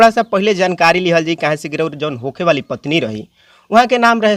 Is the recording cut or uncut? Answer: uncut